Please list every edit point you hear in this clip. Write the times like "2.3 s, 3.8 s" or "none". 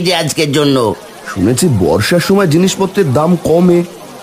1.1 s